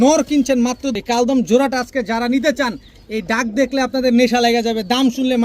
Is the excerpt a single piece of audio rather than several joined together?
no; 1 cut; at 0.9 s

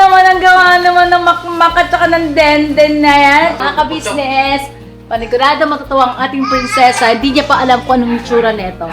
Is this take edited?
yes; 1 cut; at 3.6 s

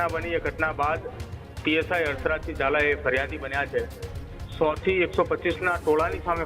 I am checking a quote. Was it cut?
no; 0 cuts

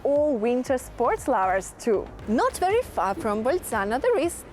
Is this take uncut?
yes; 0 cuts

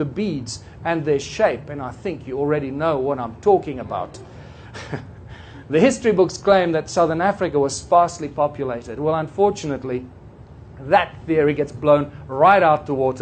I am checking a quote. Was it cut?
no; 0 cuts

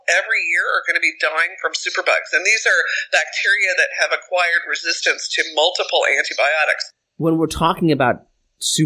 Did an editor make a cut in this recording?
no; 0 cuts

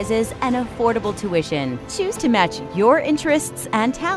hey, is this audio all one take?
yes; 0 cuts

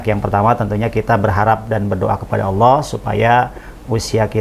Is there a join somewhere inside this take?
no; 0 cuts

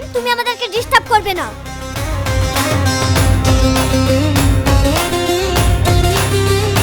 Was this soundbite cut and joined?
no; 0 cuts

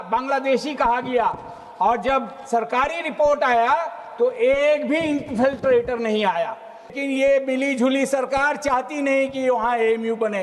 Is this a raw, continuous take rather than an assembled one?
no; 1 cut; at 6.9 s

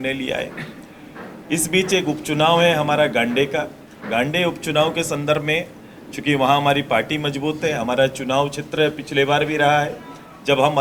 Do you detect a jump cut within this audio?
no; 0 cuts

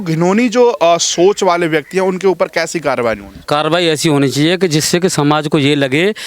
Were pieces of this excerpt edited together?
yes; 1 cut; at 3.4 s

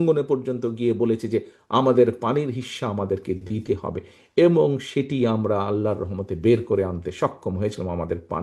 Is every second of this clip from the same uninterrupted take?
yes; 0 cuts

